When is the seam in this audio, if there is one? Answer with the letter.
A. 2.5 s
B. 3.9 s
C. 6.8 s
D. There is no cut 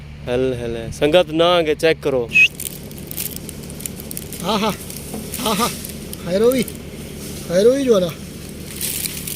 A